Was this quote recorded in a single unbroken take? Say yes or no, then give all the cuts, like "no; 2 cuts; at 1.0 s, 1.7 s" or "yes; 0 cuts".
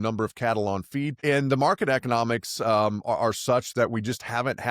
no; 1 cut; at 1.2 s